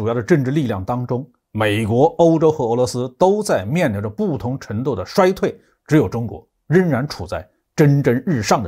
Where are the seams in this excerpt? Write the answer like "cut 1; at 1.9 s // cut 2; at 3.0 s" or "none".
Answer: none